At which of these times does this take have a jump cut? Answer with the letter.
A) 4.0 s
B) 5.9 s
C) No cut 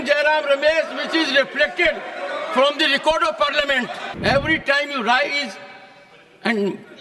A